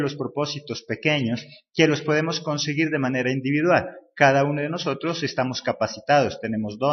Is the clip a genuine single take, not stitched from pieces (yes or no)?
no